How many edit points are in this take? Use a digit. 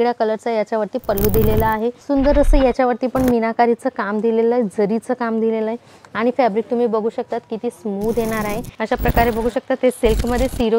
2